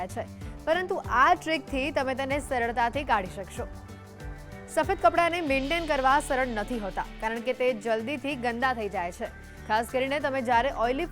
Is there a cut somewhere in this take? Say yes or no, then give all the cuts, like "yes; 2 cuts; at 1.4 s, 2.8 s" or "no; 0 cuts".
no; 0 cuts